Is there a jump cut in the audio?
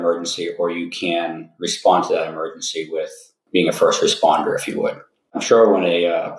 yes; 2 cuts; at 3.3 s, 5.4 s

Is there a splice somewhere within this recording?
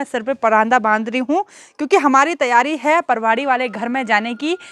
no; 0 cuts

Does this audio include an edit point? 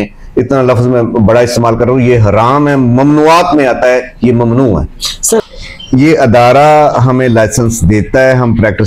yes; 1 cut; at 5.4 s

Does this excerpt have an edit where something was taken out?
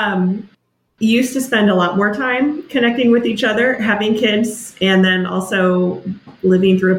no; 0 cuts

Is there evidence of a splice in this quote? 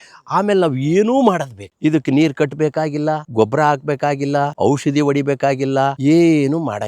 yes; 3 cuts; at 3.2 s, 4.5 s, 5.9 s

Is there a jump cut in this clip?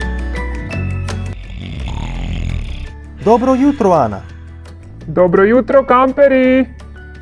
yes; 1 cut; at 1.3 s

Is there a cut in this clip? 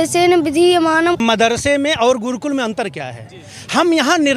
yes; 1 cut; at 1.2 s

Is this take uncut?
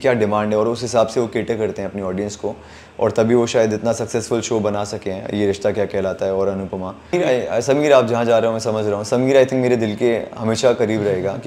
no; 1 cut; at 7.1 s

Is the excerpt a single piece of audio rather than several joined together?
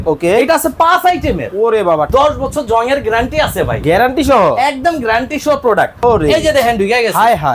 no; 2 cuts; at 2.1 s, 5.9 s

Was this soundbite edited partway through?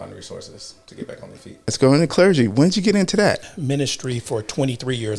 yes; 2 cuts; at 1.7 s, 3.5 s

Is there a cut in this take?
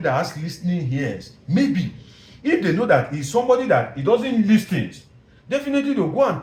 no; 0 cuts

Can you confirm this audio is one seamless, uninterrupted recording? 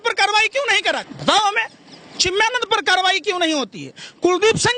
no; 1 cut; at 1.1 s

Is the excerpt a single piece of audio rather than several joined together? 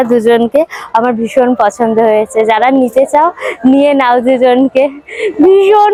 yes; 0 cuts

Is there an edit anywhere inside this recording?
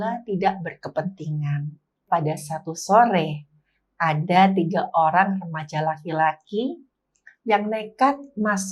yes; 1 cut; at 2.1 s

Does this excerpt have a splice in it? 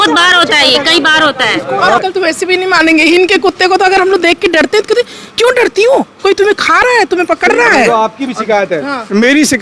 yes; 1 cut; at 2.0 s

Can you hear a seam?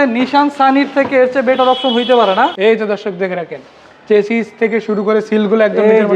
yes; 1 cut; at 2.5 s

